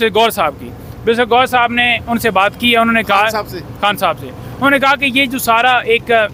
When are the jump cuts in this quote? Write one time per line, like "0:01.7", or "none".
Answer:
none